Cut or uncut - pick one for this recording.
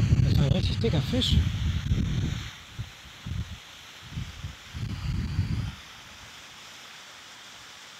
uncut